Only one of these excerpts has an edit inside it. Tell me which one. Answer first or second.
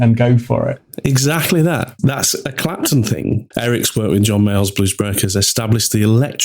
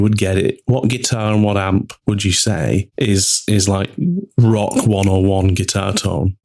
first